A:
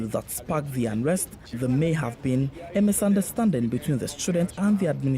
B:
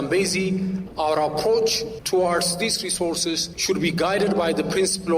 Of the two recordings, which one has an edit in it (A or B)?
B